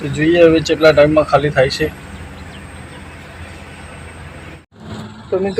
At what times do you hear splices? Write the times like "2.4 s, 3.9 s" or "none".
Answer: 4.7 s